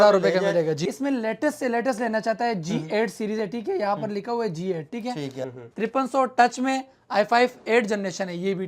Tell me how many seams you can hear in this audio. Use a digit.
2